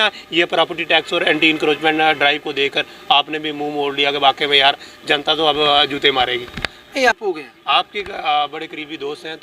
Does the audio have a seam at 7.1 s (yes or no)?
yes